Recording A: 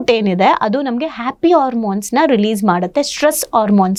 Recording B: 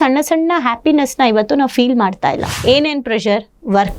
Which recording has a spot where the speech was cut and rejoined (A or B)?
B